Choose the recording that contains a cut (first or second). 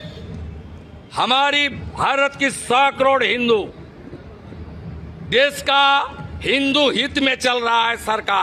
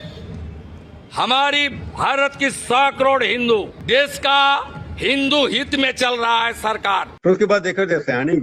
second